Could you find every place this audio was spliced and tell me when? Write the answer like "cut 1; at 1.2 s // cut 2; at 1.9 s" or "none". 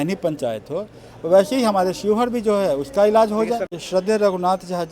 cut 1; at 3.8 s